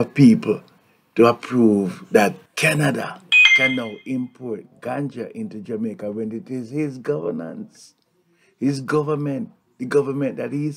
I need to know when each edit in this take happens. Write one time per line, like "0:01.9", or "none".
0:02.5